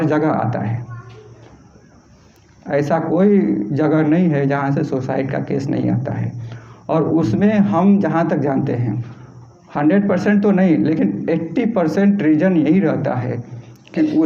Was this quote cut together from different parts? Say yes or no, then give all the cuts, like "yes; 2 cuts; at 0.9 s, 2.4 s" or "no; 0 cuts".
no; 0 cuts